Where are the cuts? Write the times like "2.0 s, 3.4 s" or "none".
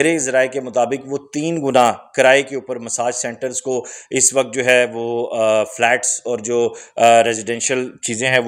none